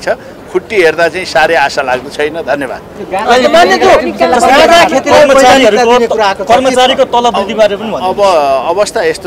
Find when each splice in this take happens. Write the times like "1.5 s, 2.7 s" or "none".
none